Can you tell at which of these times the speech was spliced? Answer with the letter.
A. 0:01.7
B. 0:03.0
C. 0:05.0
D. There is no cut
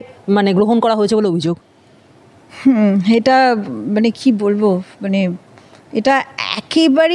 A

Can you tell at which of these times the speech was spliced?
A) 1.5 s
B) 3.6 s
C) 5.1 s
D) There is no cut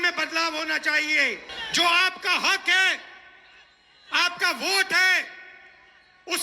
A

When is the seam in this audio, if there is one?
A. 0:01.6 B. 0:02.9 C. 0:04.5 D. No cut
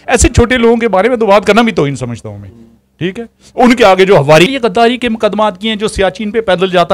C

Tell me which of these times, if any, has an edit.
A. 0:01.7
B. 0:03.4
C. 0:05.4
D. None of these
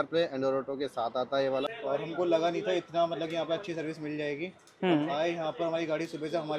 A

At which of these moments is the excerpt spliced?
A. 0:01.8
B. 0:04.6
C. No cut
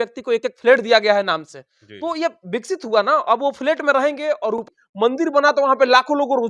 B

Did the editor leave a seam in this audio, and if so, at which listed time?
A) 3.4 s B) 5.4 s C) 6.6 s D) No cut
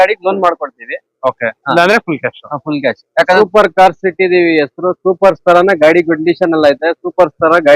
A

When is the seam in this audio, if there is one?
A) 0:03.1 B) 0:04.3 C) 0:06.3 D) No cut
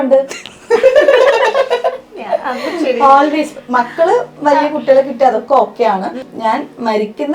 C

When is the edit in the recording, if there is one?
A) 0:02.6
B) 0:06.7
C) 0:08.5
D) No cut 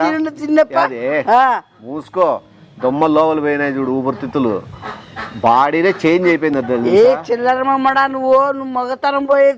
B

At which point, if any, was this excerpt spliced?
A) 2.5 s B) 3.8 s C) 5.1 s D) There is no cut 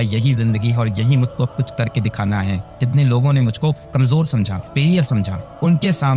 B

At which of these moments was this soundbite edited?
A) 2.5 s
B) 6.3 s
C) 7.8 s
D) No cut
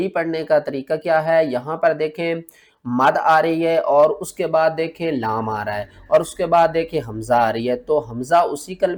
D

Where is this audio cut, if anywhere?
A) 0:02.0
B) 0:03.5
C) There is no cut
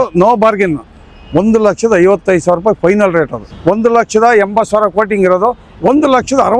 B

